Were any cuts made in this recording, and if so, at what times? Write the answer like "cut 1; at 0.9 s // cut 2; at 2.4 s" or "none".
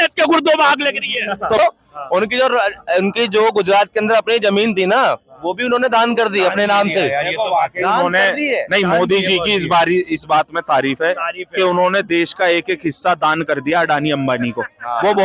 cut 1; at 1.6 s